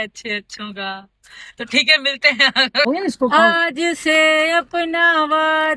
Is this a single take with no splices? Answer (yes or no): no